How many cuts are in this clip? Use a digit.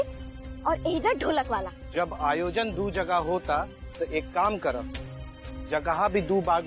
1